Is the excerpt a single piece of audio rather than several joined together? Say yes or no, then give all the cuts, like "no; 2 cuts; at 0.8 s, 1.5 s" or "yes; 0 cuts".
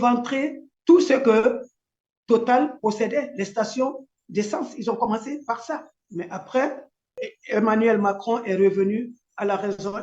yes; 0 cuts